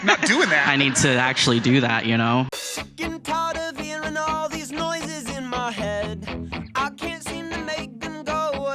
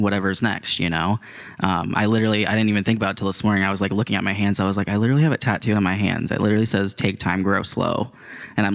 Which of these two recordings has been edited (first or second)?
first